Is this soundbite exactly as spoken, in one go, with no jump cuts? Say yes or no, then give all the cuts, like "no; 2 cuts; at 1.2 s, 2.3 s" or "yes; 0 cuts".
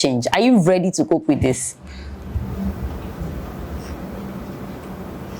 yes; 0 cuts